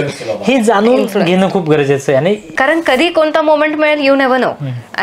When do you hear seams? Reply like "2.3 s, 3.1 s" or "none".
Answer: 2.5 s